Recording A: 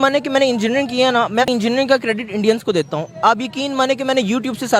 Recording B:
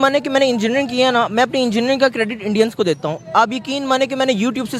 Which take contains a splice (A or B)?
A